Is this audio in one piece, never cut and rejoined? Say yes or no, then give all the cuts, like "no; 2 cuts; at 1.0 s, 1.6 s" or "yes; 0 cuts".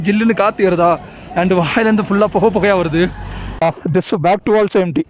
no; 1 cut; at 3.6 s